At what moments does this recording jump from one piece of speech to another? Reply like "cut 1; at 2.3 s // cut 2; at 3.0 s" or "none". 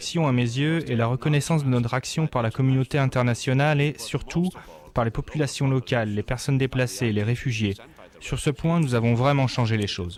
none